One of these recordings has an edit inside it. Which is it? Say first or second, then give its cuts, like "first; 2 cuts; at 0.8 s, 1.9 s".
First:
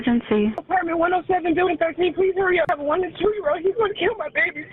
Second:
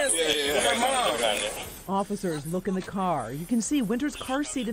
first; 1 cut; at 2.7 s